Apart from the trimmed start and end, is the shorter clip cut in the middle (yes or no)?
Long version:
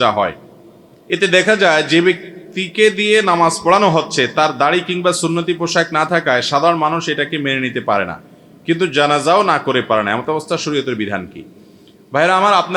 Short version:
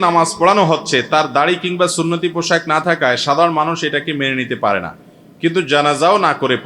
no